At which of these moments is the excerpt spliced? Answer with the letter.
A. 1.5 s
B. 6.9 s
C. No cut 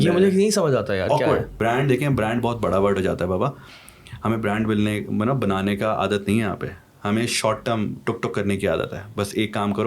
A